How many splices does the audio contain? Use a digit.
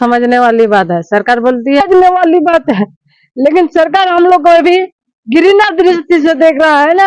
1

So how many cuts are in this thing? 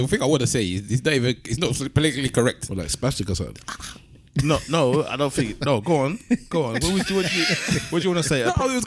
0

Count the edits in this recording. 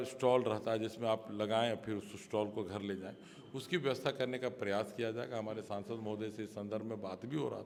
0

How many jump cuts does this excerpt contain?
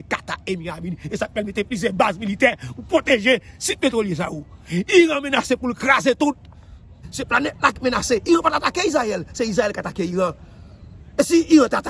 1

